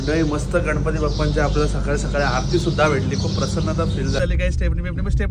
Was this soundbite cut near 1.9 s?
no; 1 cut; at 4.2 s

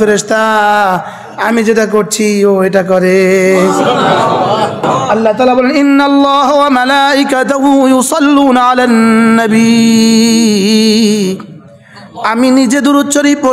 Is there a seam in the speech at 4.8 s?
yes; 1 cut; at 4.8 s

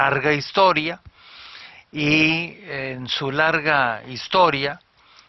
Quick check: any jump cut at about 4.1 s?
no; 1 cut; at 1.7 s

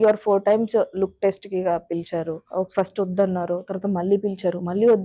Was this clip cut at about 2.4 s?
yes; 1 cut; at 2.4 s

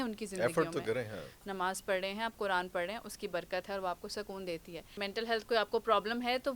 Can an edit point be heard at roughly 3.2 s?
no; 2 cuts; at 1.4 s, 5.0 s

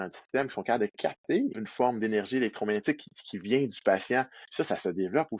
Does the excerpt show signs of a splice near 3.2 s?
no; 2 cuts; at 1.6 s, 4.4 s

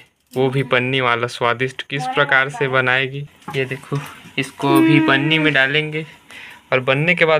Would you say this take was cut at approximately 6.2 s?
no; 1 cut; at 3.3 s

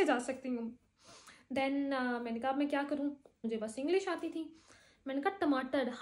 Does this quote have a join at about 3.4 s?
yes; 1 cut; at 3.4 s

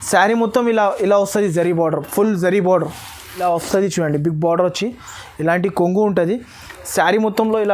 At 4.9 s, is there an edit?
no; 1 cut; at 3.4 s

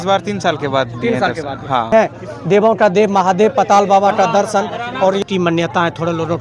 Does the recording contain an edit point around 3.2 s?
no; 2 cuts; at 1.9 s, 5.2 s

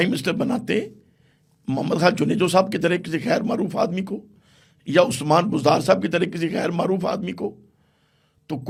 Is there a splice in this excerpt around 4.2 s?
no; 0 cuts

